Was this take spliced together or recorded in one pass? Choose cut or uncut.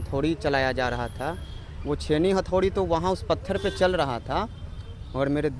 uncut